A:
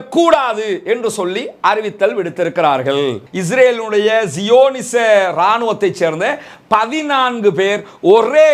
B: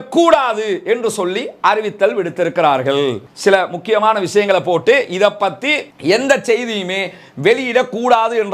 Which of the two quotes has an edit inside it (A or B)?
A